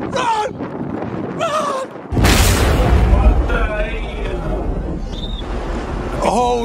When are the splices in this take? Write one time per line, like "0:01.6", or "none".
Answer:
0:01.7